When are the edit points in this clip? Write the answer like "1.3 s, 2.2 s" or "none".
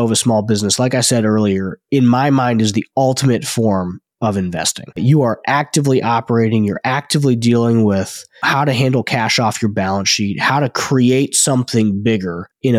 none